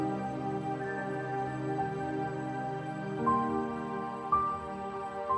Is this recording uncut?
yes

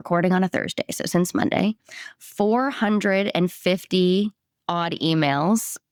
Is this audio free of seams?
yes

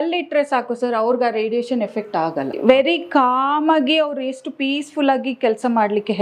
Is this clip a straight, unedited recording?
no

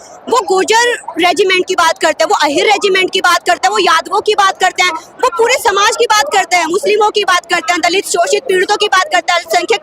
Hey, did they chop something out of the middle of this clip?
no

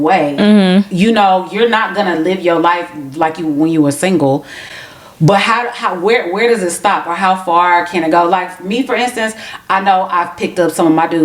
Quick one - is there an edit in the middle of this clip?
no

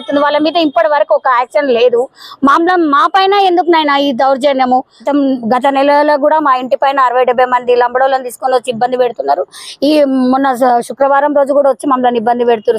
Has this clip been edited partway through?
yes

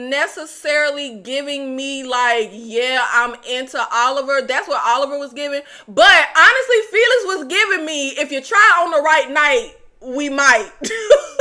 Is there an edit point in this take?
no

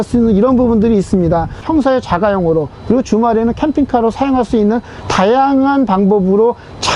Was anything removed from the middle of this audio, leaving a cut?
no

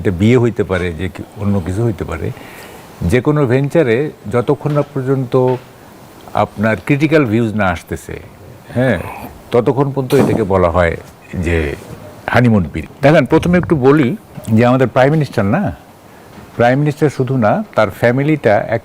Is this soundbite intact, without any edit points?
no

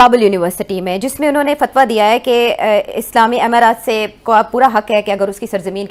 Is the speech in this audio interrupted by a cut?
no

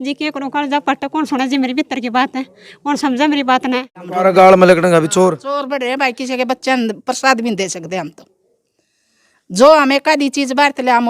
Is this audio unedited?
no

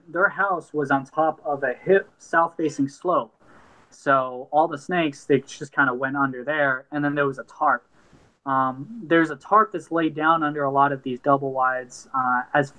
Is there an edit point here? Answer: no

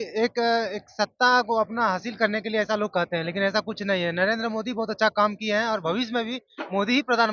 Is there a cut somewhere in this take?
no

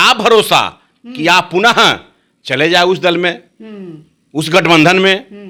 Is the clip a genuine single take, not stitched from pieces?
yes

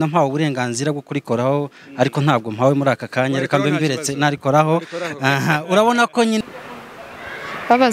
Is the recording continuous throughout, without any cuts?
no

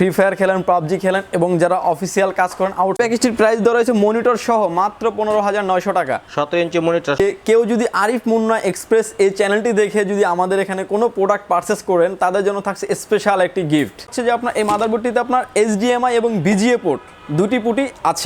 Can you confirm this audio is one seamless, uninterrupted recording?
no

